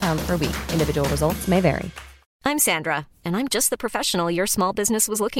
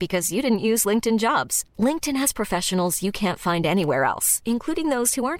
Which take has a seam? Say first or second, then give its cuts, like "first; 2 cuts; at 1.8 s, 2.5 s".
first; 1 cut; at 2.3 s